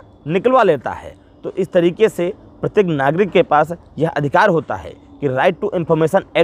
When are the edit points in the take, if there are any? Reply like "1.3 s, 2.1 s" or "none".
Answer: none